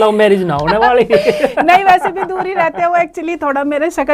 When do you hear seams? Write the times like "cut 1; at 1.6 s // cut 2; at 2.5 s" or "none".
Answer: none